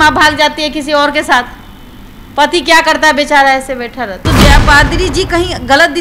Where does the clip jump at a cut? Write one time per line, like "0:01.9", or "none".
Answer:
0:04.2